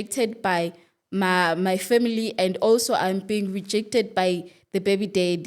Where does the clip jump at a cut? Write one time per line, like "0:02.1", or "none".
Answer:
none